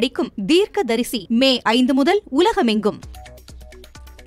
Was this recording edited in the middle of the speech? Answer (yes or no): yes